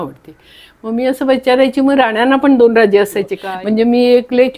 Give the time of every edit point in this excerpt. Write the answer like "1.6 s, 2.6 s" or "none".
3.4 s